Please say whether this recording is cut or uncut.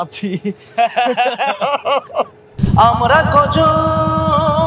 cut